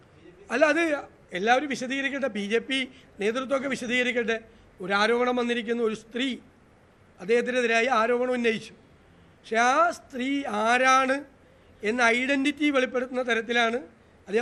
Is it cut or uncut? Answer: uncut